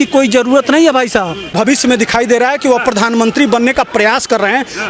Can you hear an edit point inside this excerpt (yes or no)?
yes